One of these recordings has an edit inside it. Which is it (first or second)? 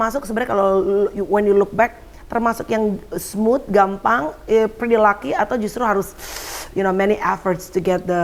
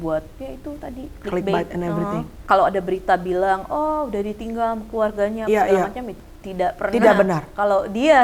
second